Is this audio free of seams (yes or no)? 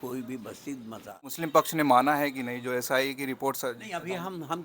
no